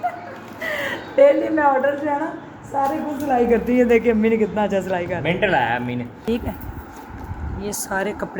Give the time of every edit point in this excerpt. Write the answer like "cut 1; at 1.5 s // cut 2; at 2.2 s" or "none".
cut 1; at 6.1 s